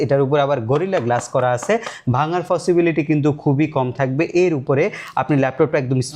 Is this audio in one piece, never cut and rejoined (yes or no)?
yes